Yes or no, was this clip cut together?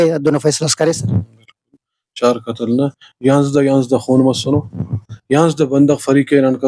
no